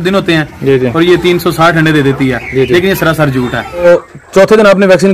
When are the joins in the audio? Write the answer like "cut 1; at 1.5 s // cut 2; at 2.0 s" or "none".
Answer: cut 1; at 3.8 s